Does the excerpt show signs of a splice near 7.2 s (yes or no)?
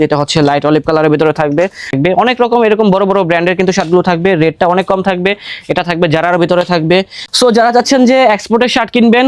yes